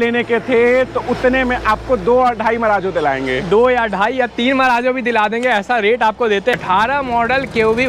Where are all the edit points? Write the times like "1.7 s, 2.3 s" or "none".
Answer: 6.6 s